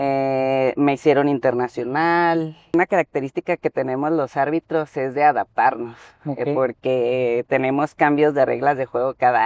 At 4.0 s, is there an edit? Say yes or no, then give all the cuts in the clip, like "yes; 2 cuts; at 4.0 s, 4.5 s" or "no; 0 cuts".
no; 1 cut; at 2.7 s